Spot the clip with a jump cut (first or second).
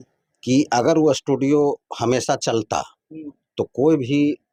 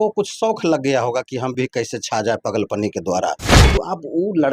second